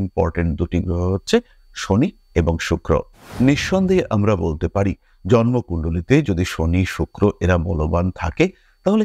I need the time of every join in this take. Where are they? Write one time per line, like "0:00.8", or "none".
0:03.3